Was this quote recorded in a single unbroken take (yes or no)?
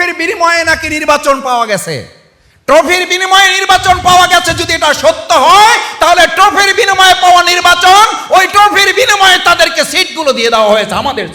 yes